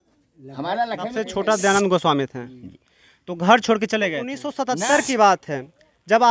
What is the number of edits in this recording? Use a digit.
2